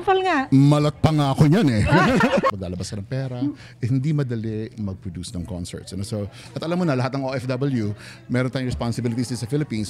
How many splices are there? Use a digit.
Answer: 2